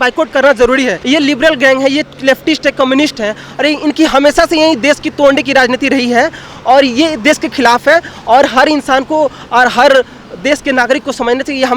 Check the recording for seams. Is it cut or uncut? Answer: cut